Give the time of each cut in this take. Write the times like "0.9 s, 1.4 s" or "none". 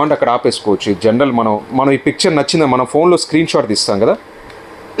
1.6 s